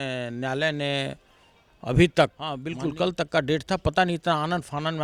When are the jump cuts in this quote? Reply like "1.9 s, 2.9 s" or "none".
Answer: 2.6 s